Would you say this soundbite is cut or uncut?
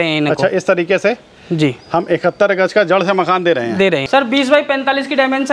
cut